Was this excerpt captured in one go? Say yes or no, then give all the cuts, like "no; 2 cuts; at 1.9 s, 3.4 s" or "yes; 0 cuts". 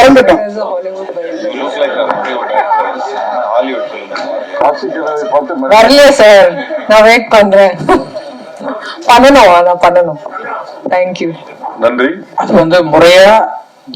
no; 1 cut; at 12.2 s